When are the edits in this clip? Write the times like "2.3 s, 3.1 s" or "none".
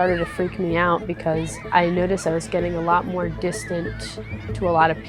1.6 s